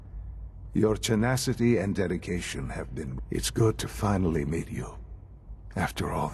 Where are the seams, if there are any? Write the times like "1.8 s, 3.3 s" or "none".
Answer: 3.2 s